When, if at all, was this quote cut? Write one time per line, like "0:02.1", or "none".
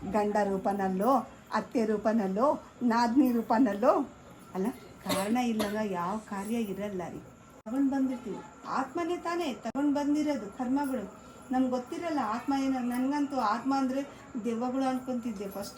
0:07.6